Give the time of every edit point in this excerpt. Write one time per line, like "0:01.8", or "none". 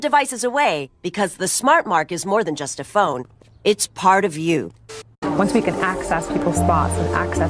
0:05.1